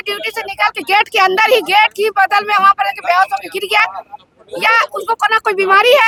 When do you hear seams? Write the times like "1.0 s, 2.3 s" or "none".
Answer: none